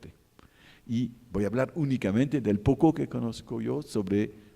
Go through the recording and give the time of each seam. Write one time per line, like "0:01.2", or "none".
0:03.6